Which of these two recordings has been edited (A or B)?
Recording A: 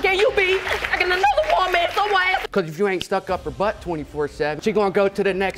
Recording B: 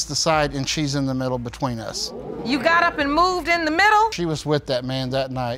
A